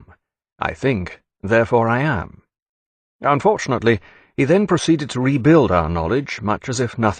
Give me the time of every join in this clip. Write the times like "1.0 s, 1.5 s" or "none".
3.1 s